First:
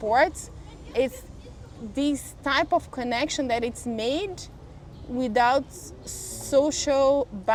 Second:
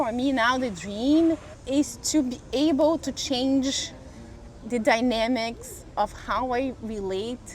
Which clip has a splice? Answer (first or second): second